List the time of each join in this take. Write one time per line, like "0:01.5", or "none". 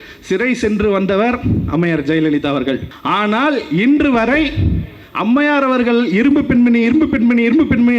0:02.9